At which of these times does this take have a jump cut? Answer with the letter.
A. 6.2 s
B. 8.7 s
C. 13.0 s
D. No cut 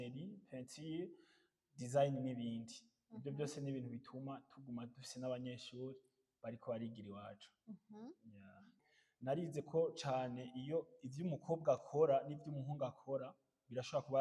B